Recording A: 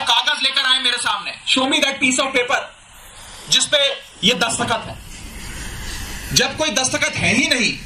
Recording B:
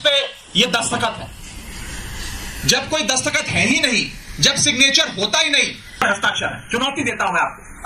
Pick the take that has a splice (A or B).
B